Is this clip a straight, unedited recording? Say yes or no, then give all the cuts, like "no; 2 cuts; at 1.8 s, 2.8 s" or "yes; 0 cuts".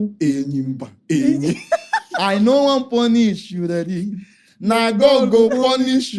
yes; 0 cuts